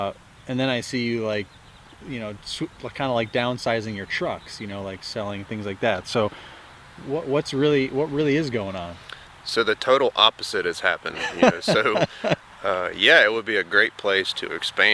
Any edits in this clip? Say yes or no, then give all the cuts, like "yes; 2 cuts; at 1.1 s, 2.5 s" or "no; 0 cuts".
no; 0 cuts